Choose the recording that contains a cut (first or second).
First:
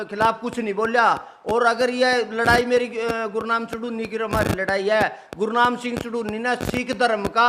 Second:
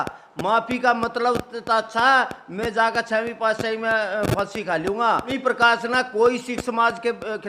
second